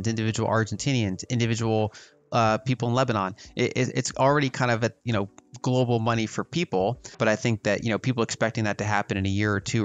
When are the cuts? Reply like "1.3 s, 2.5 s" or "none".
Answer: 7.0 s